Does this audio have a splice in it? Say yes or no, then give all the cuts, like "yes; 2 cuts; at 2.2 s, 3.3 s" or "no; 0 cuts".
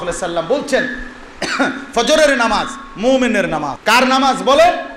yes; 1 cut; at 3.8 s